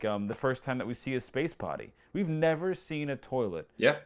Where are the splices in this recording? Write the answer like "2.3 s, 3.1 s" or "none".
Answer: none